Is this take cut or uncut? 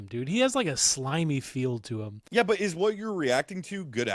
cut